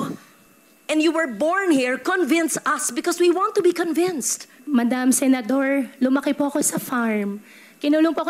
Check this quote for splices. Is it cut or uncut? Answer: cut